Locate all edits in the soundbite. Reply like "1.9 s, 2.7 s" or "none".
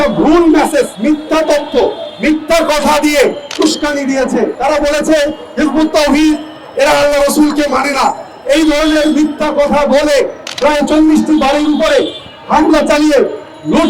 0.9 s, 3.5 s, 4.5 s, 10.4 s